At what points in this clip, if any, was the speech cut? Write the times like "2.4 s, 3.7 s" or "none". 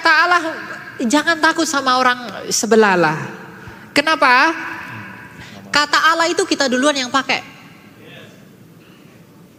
none